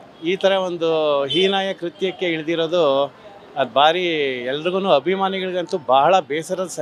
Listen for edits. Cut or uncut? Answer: uncut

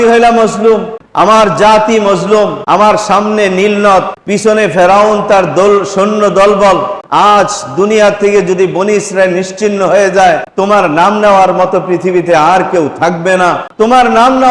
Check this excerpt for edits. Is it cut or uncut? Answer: cut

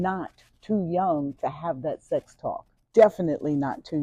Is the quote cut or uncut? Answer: uncut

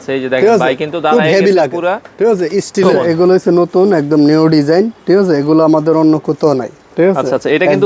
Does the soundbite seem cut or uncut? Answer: cut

